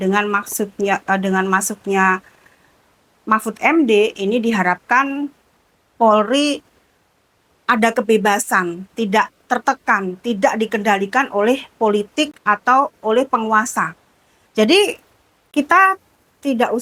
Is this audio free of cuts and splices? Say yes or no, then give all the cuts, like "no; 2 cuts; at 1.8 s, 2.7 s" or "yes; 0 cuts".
yes; 0 cuts